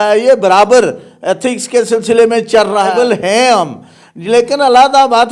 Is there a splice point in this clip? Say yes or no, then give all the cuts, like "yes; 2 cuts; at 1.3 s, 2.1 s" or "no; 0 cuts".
yes; 1 cut; at 2.9 s